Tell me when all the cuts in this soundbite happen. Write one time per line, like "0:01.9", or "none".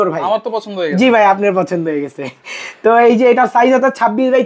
none